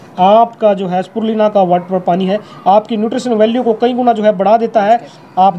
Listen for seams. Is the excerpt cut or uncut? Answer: uncut